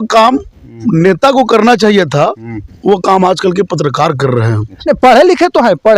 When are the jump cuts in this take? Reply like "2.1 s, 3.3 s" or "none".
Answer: 4.7 s

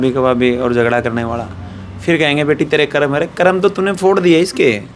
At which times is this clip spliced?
none

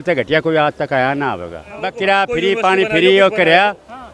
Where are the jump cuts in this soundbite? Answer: 1.9 s

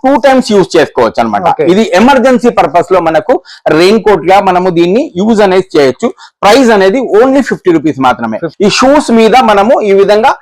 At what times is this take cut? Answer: 8.5 s

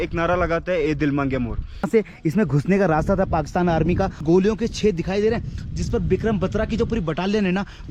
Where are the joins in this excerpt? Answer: 1.9 s, 4.2 s

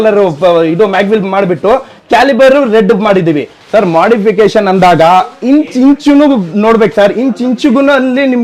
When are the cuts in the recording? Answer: 3.5 s

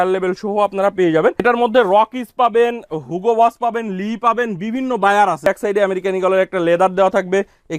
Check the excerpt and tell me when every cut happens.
1.4 s, 5.5 s

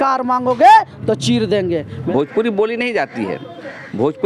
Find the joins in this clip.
2.0 s

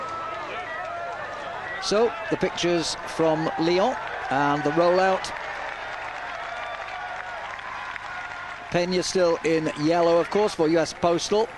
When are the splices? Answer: 1.7 s

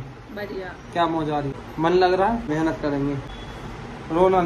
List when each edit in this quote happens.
1.6 s, 2.5 s, 3.3 s

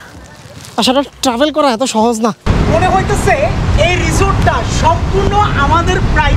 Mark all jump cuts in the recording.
2.4 s

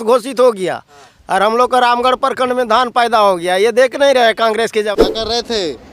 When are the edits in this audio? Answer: 4.9 s

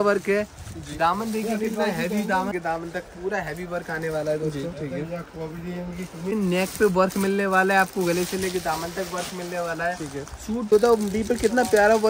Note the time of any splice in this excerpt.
2.5 s, 6.3 s, 10.7 s

